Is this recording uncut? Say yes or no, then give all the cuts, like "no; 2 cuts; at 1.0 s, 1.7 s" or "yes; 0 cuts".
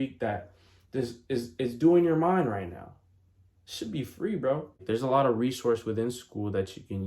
no; 1 cut; at 4.8 s